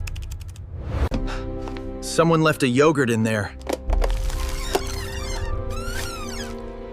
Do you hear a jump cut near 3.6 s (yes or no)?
yes